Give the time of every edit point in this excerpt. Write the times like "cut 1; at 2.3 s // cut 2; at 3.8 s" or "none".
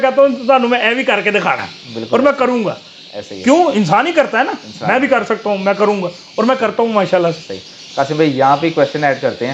none